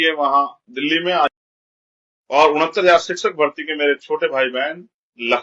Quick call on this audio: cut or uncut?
cut